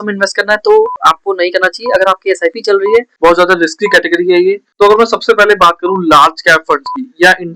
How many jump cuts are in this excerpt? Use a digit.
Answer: 2